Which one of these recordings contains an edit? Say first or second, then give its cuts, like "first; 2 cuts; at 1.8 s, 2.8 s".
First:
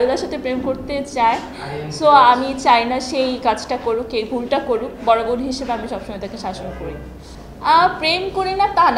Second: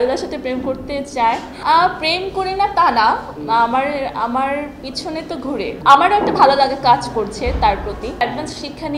second; 3 cuts; at 1.5 s, 5.7 s, 8.2 s